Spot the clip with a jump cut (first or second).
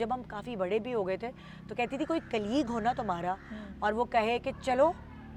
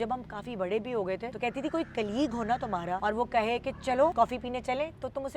second